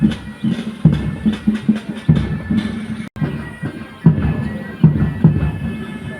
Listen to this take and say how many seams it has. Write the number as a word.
one